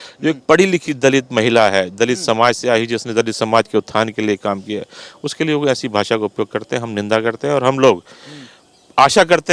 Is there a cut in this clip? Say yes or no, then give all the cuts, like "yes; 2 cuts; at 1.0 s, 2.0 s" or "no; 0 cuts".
no; 0 cuts